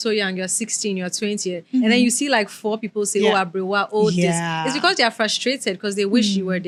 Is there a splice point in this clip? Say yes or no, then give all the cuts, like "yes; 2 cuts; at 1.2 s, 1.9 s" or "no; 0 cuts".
no; 0 cuts